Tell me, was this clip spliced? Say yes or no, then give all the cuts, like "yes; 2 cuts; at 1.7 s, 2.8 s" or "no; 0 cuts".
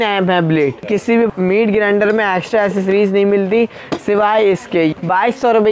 yes; 2 cuts; at 1.1 s, 4.9 s